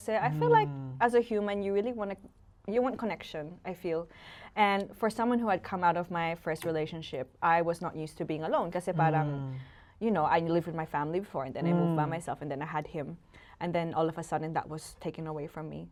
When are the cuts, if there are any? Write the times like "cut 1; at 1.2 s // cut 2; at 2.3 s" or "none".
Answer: none